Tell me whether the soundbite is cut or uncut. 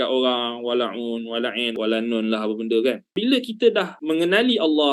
cut